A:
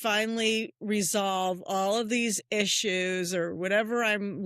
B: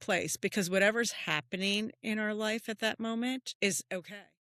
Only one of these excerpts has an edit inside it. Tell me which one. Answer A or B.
B